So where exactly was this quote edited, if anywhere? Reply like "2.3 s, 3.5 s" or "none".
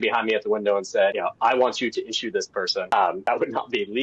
1.2 s, 3.0 s

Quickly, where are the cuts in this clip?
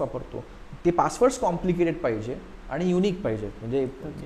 none

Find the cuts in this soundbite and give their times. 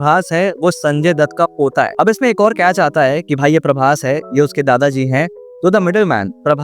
1.9 s

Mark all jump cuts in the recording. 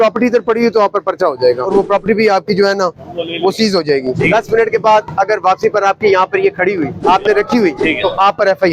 1.6 s, 4.2 s, 7.0 s, 7.8 s

